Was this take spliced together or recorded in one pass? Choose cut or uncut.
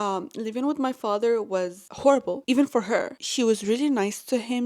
uncut